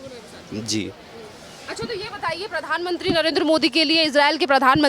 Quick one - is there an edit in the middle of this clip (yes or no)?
no